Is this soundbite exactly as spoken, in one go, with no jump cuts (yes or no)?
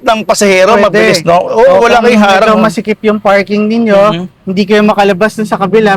yes